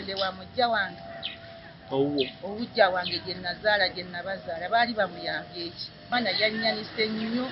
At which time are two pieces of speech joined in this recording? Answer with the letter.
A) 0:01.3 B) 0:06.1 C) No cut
B